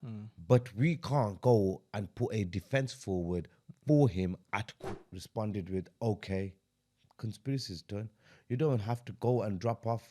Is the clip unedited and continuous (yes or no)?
no